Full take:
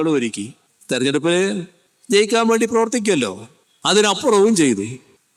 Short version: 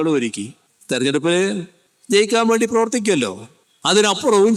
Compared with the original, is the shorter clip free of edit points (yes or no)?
yes